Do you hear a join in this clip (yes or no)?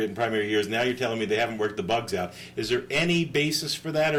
no